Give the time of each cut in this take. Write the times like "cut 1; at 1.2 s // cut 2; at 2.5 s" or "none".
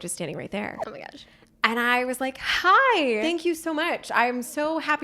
cut 1; at 3.2 s